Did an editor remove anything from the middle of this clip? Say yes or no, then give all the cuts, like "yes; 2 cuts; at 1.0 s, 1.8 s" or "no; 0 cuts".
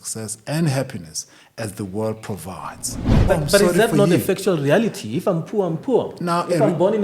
yes; 1 cut; at 3.1 s